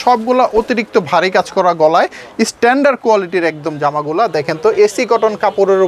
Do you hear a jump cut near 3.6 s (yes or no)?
no